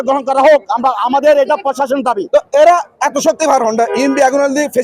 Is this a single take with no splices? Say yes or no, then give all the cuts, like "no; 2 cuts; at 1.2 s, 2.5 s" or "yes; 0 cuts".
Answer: no; 1 cut; at 2.2 s